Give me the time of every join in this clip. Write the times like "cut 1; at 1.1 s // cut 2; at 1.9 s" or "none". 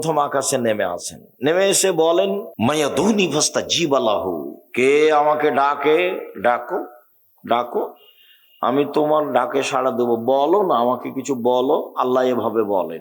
cut 1; at 2.5 s